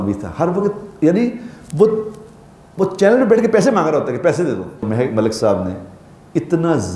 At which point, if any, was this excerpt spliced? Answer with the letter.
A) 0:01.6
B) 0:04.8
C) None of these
B